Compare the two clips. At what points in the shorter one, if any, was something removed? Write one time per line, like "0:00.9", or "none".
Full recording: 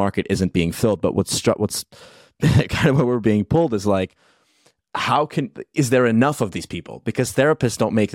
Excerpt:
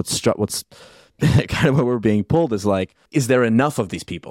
0:03.0